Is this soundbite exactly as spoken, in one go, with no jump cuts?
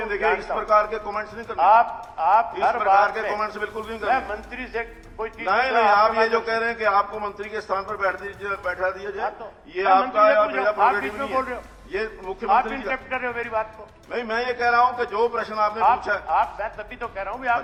yes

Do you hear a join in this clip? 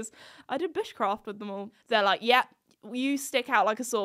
yes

